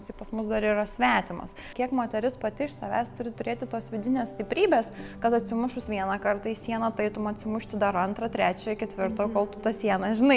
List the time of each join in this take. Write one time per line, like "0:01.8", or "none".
0:01.6